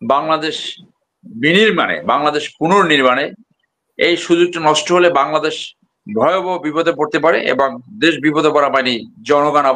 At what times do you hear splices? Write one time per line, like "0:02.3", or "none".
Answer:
none